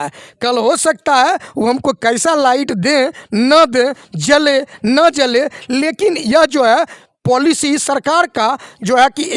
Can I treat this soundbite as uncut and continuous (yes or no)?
yes